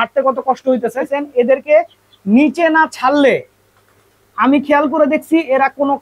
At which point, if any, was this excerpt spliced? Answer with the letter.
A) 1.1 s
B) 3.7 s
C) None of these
A